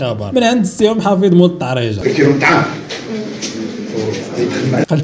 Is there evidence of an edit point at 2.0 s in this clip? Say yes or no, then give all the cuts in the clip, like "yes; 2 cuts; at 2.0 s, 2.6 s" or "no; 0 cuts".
yes; 1 cut; at 2.0 s